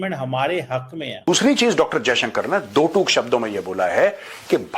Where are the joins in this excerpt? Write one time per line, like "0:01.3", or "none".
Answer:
0:01.3

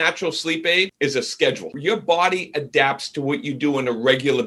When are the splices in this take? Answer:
0:00.9
0:01.7

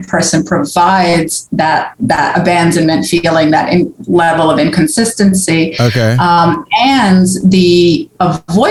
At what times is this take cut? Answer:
none

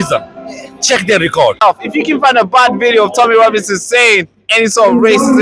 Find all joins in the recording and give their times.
0:01.6

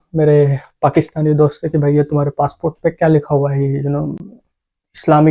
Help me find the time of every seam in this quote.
none

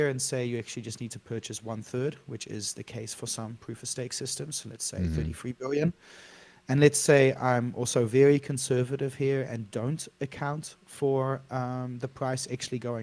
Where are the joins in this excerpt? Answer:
none

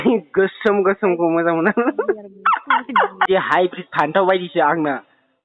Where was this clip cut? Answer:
0:03.3

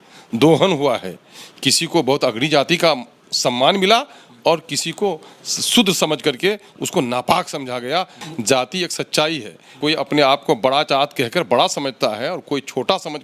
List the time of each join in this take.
0:08.3
0:09.7

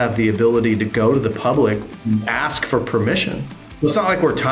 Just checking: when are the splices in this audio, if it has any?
0:01.9
0:03.6

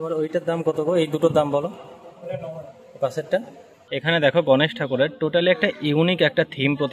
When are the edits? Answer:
0:03.9

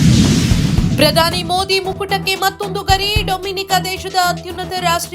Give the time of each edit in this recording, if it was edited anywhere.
0:00.9

